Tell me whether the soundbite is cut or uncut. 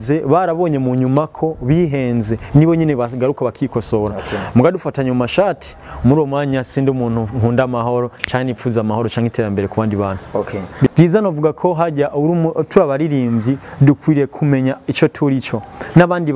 cut